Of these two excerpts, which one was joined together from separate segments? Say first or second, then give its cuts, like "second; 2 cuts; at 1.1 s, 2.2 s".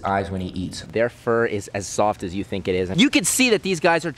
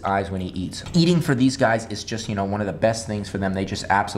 first; 2 cuts; at 0.9 s, 3.1 s